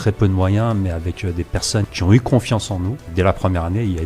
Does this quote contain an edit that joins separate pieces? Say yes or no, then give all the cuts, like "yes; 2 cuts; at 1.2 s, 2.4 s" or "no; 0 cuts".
yes; 2 cuts; at 1.9 s, 3.0 s